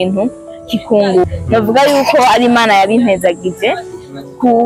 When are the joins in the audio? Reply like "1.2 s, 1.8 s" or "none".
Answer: 1.3 s